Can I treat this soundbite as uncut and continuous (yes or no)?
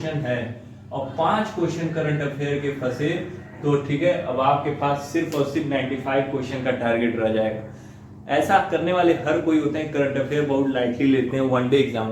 yes